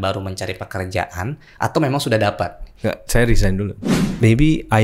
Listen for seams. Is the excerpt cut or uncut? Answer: cut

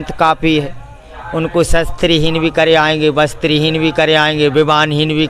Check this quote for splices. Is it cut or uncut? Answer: uncut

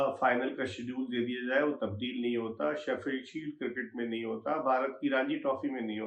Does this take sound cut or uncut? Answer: uncut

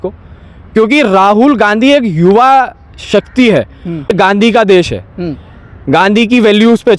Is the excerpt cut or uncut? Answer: cut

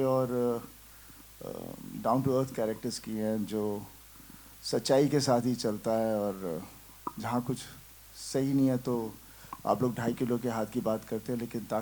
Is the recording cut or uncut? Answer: uncut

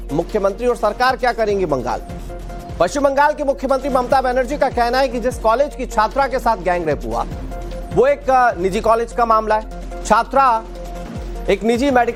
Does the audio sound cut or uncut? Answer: uncut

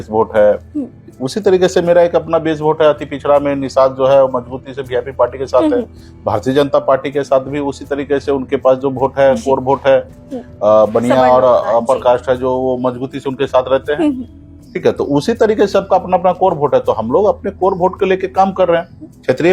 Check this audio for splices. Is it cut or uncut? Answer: uncut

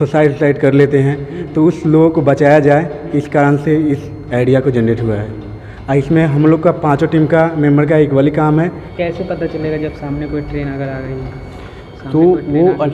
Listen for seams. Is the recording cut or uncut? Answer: cut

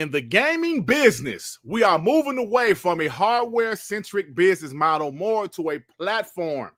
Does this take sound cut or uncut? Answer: uncut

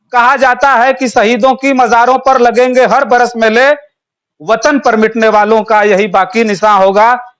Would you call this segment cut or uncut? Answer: uncut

